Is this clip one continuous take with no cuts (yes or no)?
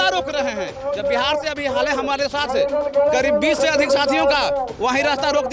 yes